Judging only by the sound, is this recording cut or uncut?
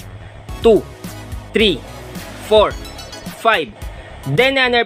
uncut